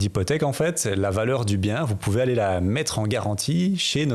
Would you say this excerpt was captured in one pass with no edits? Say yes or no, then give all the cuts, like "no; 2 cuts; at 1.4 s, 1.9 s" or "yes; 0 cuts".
yes; 0 cuts